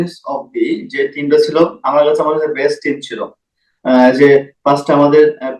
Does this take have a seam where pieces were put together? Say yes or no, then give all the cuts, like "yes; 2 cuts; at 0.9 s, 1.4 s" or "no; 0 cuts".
no; 0 cuts